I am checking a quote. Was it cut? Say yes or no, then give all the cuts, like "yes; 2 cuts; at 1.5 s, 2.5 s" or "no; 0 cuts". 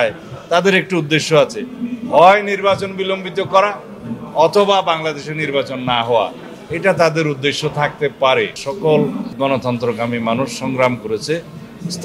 yes; 2 cuts; at 8.6 s, 9.3 s